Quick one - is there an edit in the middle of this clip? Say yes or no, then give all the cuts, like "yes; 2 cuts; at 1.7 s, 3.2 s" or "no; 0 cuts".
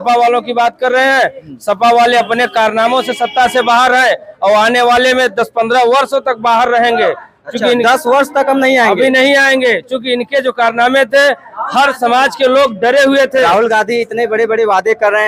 no; 0 cuts